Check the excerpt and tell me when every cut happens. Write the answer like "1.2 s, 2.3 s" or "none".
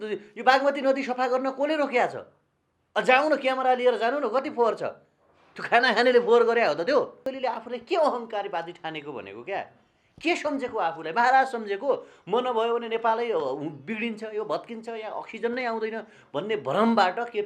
7.2 s